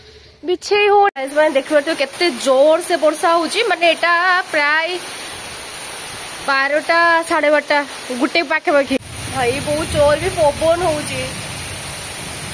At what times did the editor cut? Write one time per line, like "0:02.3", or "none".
0:01.1
0:09.0